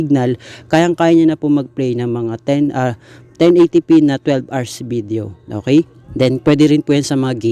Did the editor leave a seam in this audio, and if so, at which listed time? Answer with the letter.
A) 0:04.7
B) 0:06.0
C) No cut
B